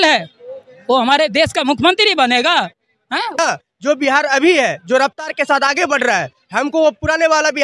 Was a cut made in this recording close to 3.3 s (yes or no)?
yes